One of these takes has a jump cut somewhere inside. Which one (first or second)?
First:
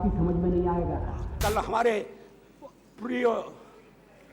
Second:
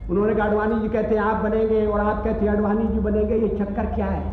first